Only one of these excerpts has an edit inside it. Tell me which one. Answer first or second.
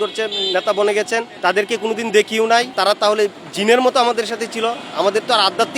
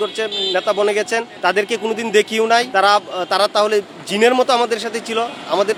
first